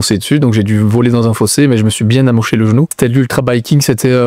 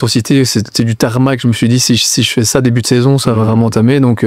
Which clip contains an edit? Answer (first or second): first